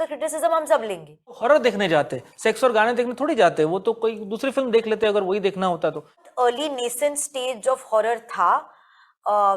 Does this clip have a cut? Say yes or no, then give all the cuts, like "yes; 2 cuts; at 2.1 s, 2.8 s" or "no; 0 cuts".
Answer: yes; 2 cuts; at 1.4 s, 6.3 s